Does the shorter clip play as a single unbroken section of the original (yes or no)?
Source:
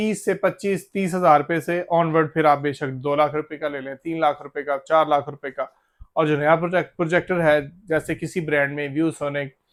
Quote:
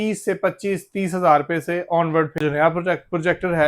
no